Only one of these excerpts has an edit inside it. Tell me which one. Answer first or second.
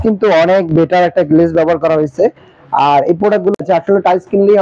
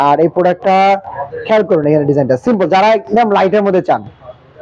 first